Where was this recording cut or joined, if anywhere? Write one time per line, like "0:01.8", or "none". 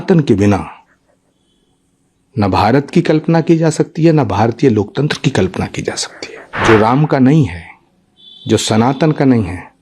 0:06.5